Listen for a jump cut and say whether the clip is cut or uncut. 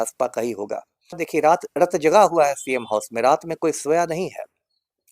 cut